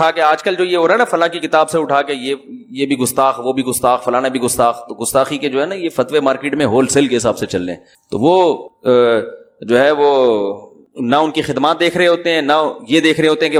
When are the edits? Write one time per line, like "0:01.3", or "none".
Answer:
none